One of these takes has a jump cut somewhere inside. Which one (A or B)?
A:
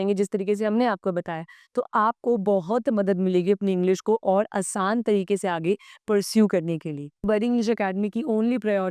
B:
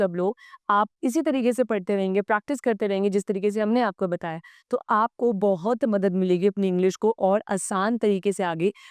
A